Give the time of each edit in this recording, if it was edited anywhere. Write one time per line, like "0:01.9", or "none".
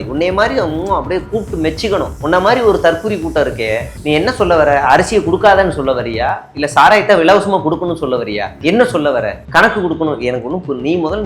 0:02.1
0:08.5